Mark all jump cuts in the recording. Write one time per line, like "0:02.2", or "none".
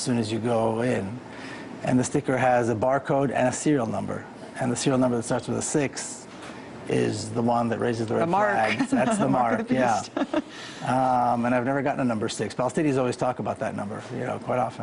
0:08.2

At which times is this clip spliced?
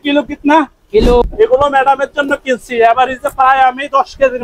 0:01.2

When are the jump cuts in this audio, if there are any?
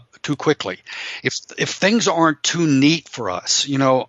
none

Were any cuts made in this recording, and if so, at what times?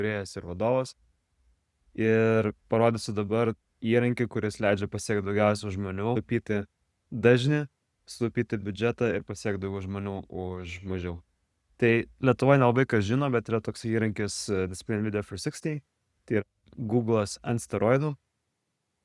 0:06.2

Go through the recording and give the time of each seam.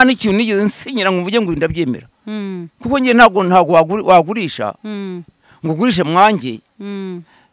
none

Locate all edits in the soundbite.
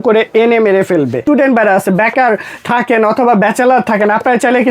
0:01.2

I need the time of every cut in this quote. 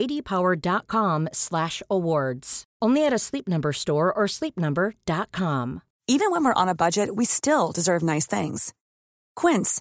0:05.9

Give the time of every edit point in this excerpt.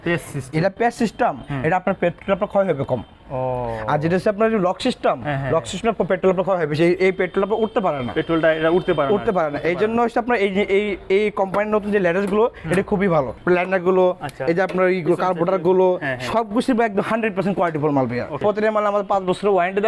0:13.4
0:18.4

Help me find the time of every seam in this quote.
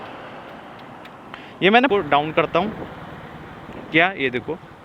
0:01.9

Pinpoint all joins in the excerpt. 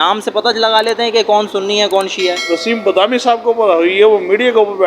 0:02.4

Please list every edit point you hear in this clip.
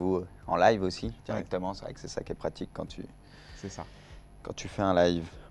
0:03.6

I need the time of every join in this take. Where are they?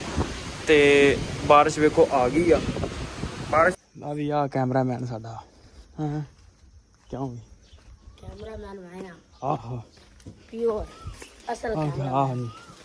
0:03.8

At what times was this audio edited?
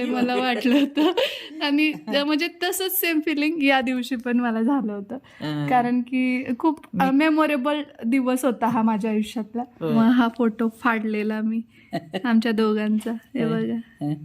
0:09.9

